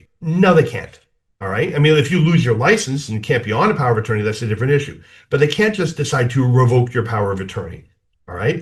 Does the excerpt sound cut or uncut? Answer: uncut